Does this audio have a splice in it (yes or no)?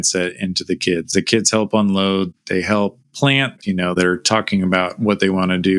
yes